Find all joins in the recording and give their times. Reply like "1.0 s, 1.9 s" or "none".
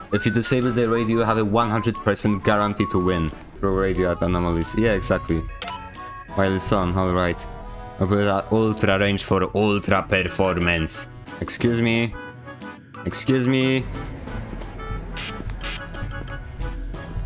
3.5 s